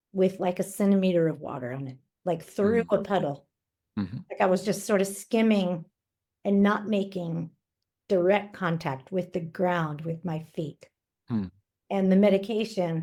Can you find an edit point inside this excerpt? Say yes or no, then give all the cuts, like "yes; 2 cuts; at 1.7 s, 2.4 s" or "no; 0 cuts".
no; 0 cuts